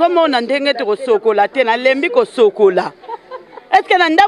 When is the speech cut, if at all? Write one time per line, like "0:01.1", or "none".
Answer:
none